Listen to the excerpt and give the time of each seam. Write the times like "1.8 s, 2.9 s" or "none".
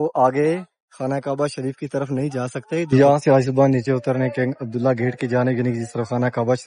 2.9 s